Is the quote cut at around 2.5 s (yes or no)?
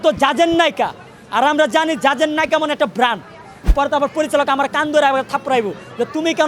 no